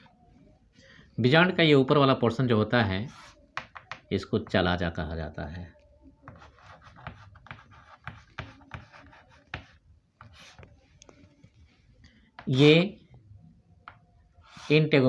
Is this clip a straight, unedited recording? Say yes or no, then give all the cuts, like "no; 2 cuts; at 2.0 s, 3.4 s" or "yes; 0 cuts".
yes; 0 cuts